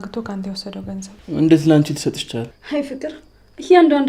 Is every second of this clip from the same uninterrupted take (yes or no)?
no